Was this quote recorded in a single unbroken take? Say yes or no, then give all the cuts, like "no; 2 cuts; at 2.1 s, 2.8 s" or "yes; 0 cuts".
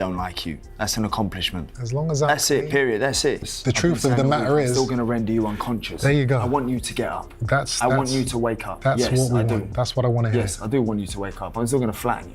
no; 1 cut; at 3.4 s